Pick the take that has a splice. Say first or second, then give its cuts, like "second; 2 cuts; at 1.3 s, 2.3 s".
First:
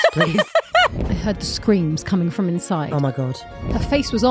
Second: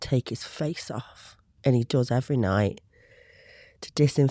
first; 2 cuts; at 1.0 s, 3.5 s